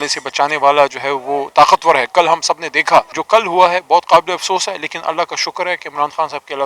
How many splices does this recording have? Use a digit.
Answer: 1